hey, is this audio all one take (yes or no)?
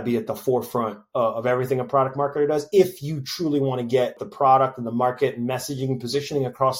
no